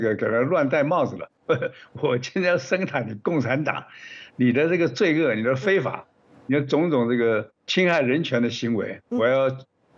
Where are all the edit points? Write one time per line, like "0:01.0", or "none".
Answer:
0:01.3
0:07.7